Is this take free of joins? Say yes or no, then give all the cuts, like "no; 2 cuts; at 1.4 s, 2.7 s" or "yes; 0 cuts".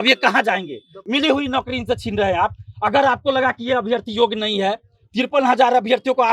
no; 1 cut; at 1.0 s